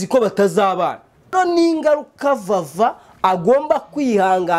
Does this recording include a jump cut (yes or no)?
yes